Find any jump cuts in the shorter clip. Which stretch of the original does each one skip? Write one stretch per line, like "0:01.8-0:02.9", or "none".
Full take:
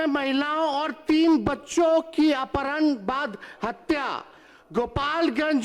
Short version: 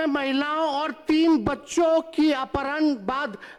none